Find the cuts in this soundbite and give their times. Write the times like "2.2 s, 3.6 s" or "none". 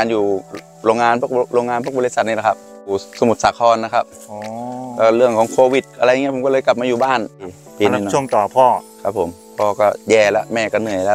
3.1 s, 7.5 s